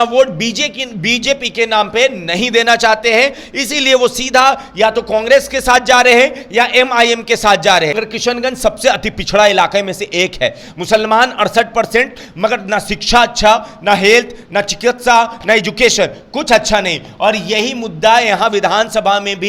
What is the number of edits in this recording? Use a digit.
1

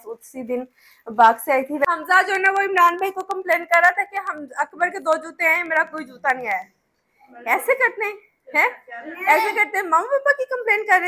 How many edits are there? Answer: 1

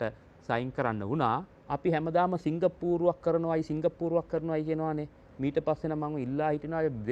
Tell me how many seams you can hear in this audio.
1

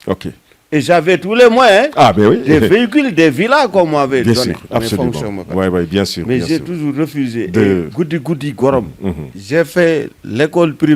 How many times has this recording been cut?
1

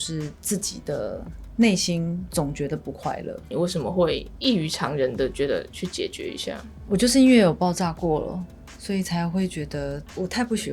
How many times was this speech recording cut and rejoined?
2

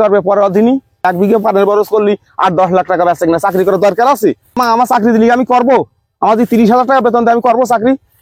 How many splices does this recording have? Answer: 2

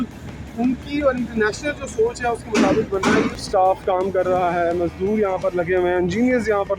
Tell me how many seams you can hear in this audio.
1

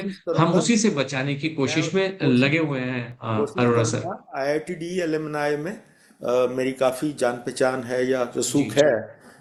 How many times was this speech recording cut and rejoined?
0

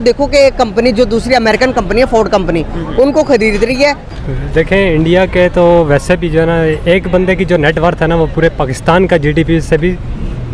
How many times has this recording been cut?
1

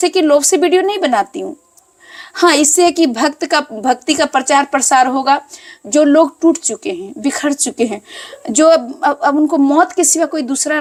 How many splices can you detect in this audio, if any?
0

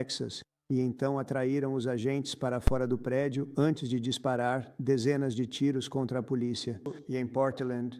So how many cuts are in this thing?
1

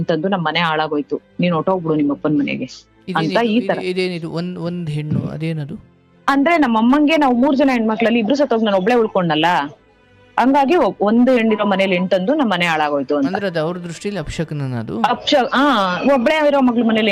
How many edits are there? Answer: 0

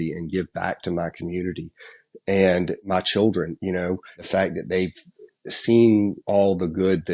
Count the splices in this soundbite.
1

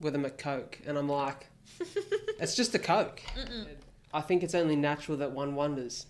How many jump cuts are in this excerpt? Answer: 1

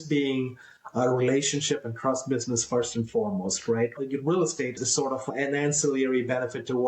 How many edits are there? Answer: 2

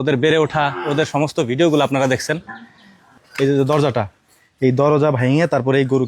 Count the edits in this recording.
1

